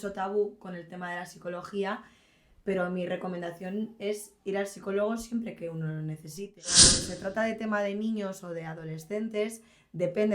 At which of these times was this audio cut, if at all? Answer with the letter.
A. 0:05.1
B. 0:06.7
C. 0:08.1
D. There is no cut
B